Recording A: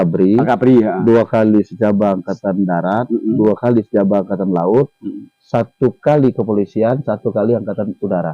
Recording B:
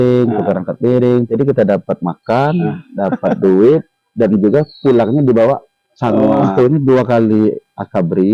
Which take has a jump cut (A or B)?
B